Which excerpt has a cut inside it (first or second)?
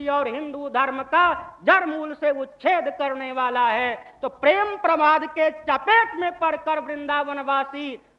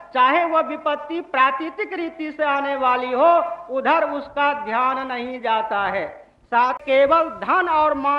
second